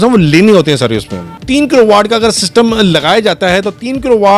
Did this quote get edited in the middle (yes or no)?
yes